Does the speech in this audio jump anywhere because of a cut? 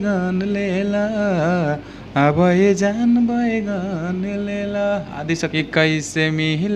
yes; 1 cut; at 5.6 s

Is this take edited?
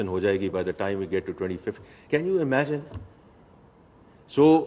no; 0 cuts

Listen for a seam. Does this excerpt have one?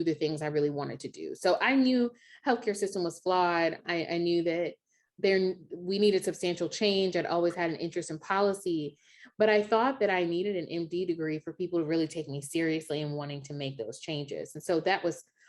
yes; 2 cuts; at 3.8 s, 5.0 s

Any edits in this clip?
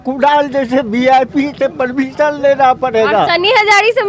no; 0 cuts

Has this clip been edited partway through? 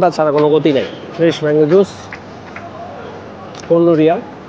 yes; 1 cut; at 1.0 s

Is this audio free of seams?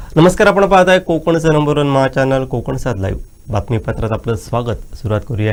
yes; 0 cuts

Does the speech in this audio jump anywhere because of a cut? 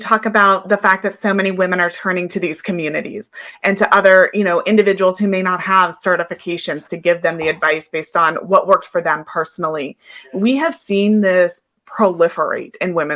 no; 0 cuts

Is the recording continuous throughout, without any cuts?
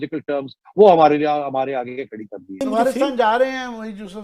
no; 1 cut; at 2.6 s

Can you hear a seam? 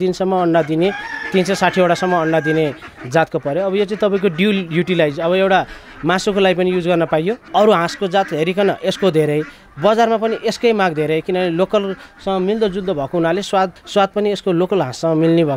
yes; 1 cut; at 7.4 s

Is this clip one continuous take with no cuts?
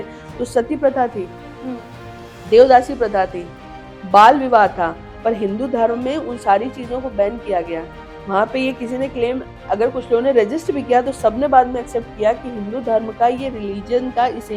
yes; 0 cuts

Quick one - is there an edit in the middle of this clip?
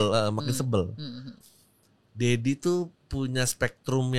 yes; 1 cut; at 1.2 s

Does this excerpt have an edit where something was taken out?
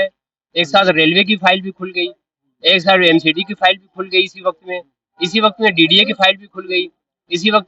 no; 0 cuts

